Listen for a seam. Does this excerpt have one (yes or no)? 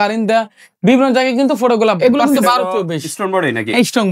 yes